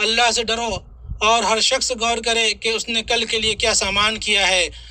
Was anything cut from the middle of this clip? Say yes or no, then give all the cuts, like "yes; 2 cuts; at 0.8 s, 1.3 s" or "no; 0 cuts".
no; 0 cuts